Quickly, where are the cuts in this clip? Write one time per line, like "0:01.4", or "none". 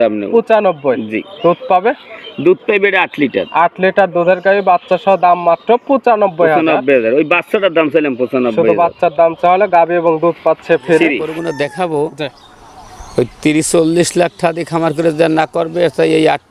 0:11.3